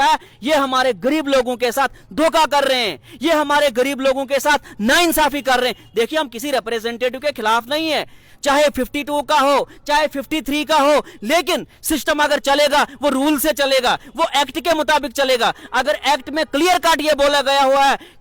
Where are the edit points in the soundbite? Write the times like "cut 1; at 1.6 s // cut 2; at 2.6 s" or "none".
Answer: none